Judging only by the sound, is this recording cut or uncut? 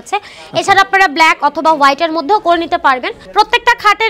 cut